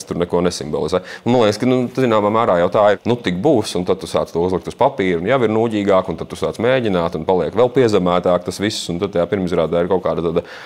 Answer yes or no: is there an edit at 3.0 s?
yes